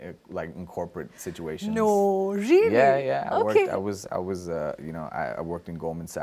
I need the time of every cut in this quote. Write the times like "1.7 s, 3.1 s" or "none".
none